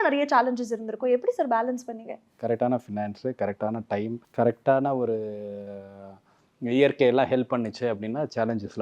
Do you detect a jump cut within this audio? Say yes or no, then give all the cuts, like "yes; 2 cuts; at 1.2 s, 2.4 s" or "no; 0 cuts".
yes; 2 cuts; at 2.3 s, 4.2 s